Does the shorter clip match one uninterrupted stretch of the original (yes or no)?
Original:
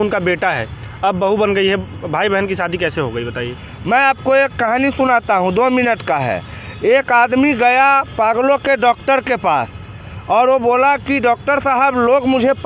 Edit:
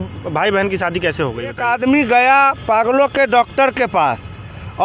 no